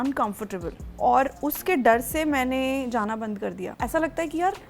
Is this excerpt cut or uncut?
cut